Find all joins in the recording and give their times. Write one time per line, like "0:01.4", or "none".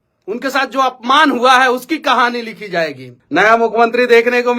0:03.0